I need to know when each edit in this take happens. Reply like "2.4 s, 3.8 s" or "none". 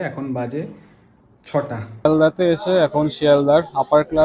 2.0 s